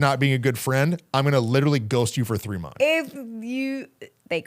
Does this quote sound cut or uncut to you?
cut